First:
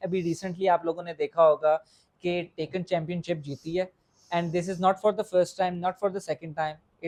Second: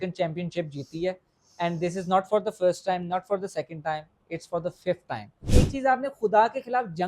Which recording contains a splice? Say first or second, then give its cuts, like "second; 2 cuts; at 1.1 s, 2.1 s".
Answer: second; 1 cut; at 5.5 s